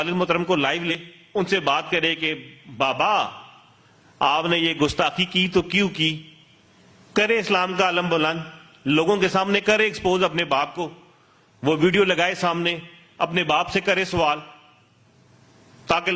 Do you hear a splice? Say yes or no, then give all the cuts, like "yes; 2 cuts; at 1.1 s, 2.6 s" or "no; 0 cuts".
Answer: yes; 1 cut; at 1.1 s